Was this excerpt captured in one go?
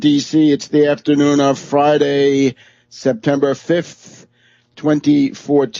yes; 0 cuts

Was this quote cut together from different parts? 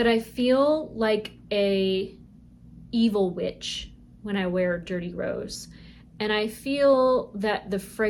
no; 0 cuts

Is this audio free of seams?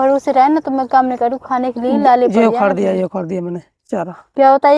yes; 0 cuts

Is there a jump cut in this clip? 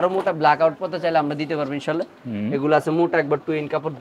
no; 0 cuts

